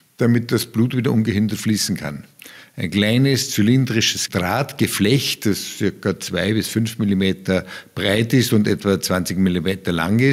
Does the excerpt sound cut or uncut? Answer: cut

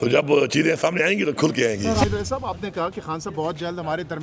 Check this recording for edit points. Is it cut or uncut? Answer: cut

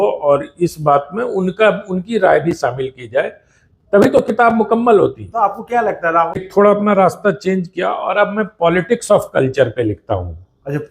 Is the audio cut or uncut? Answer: cut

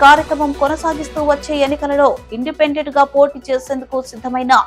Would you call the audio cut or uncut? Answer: uncut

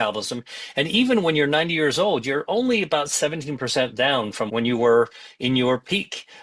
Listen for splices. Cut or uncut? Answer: cut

